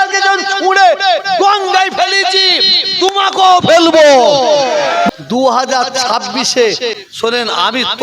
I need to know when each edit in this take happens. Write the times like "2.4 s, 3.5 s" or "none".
5.1 s, 7.0 s